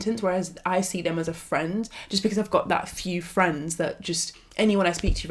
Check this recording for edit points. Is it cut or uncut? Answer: uncut